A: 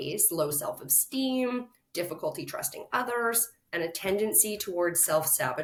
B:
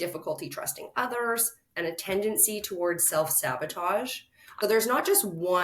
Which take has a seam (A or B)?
B